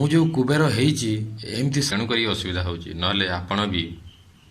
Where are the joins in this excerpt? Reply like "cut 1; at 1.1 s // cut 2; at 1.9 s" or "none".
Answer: cut 1; at 1.9 s